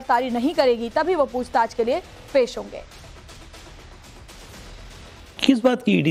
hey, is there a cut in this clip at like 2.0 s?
no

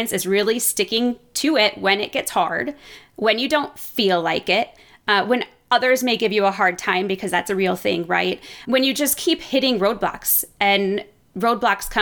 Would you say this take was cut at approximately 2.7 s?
no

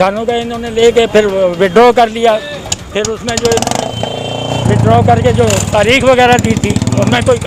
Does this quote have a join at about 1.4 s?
no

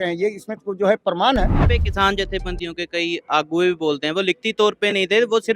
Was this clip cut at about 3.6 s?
no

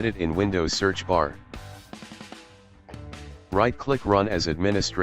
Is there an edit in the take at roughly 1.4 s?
yes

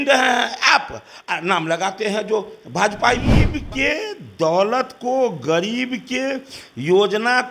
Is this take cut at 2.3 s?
no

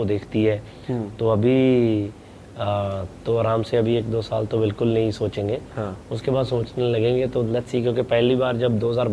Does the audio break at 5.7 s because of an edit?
no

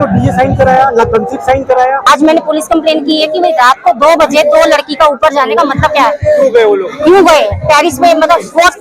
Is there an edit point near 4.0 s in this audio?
no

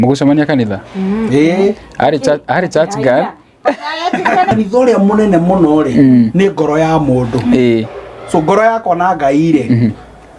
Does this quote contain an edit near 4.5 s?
yes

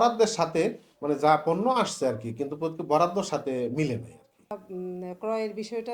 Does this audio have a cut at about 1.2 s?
no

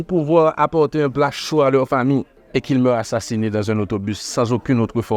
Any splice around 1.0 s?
no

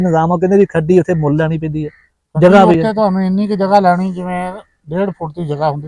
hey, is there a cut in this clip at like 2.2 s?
no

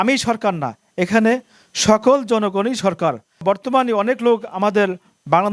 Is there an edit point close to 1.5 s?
no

